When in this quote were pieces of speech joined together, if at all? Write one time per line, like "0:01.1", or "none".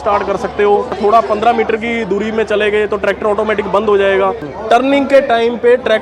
0:01.0
0:04.5